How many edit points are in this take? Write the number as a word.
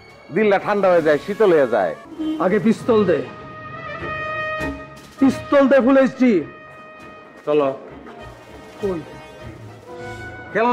one